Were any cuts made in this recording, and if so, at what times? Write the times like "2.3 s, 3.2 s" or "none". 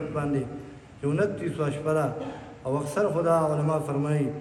none